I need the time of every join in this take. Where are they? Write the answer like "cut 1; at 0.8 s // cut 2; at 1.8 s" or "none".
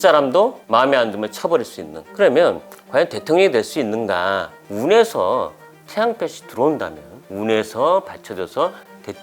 cut 1; at 4.5 s